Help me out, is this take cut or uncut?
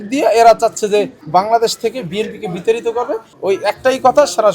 cut